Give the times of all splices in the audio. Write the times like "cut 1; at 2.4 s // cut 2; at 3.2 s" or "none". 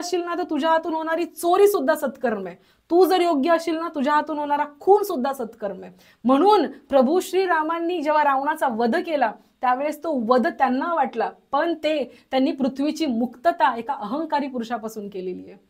none